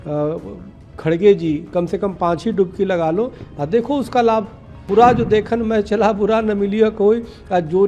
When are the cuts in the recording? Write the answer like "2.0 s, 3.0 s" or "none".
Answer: 4.9 s

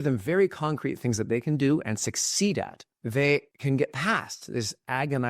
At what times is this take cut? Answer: 3.5 s

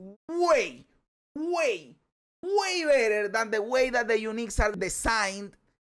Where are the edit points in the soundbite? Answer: 4.7 s

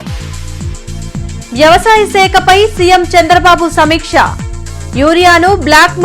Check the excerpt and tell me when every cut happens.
0.9 s

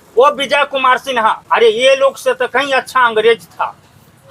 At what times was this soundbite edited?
1.4 s

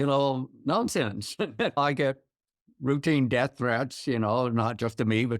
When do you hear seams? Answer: 1.8 s

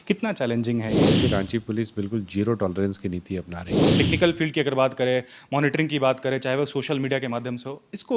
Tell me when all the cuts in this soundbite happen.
1.2 s, 3.9 s

